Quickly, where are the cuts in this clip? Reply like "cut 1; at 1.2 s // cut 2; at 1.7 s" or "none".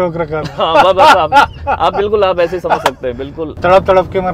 cut 1; at 3.4 s